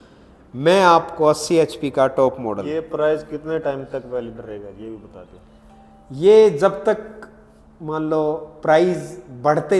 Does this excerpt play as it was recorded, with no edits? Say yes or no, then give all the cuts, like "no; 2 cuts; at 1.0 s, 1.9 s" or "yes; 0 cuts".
no; 1 cut; at 2.7 s